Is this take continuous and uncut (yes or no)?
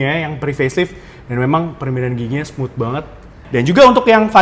no